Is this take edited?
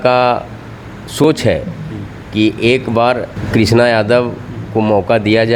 yes; 1 cut; at 3.4 s

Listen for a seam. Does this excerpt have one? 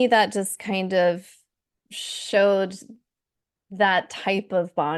no; 0 cuts

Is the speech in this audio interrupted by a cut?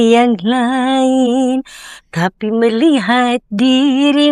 no; 0 cuts

